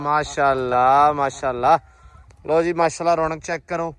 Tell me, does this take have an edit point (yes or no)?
no